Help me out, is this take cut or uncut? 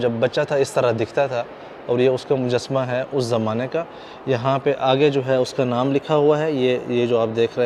uncut